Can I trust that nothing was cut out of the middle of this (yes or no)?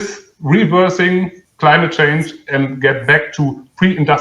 no